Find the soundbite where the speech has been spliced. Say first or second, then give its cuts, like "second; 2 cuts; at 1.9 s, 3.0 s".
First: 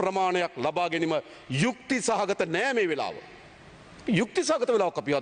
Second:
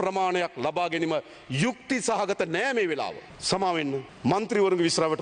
second; 2 cuts; at 3.3 s, 4.1 s